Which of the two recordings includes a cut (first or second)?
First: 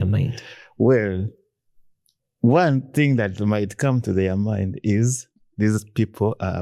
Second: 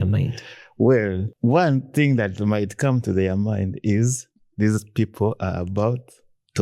second